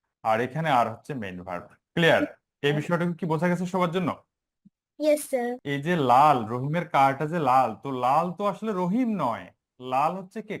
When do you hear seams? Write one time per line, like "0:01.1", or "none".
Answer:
0:05.6

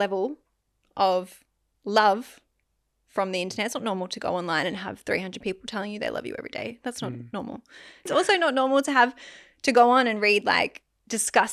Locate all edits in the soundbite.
0:08.1

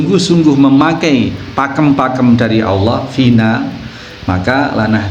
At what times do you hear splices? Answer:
none

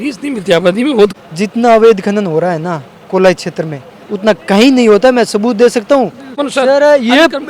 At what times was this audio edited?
0:01.1
0:06.4

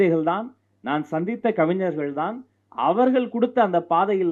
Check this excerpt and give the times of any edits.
none

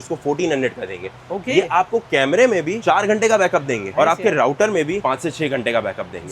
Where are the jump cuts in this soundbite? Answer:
none

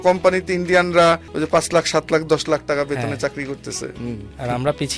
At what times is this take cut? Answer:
0:01.3

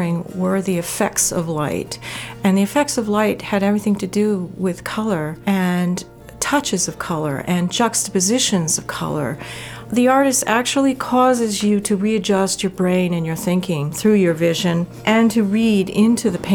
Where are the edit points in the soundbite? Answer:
0:05.3
0:09.8
0:13.9
0:14.9

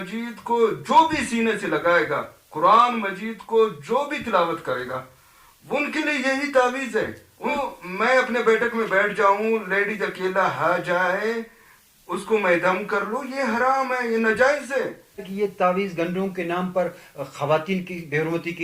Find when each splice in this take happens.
0:07.6
0:15.3

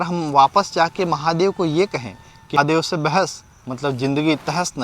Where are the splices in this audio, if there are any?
0:02.6

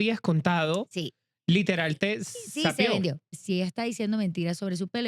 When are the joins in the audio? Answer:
0:03.4

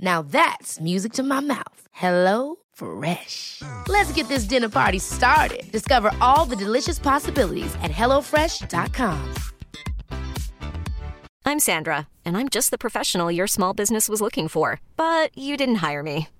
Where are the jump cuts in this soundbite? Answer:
0:11.3

